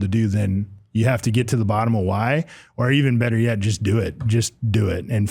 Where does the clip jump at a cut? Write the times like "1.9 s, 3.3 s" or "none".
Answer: none